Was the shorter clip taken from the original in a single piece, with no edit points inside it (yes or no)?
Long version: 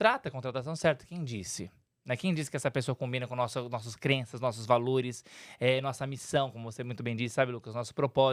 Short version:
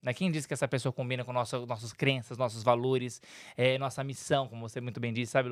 yes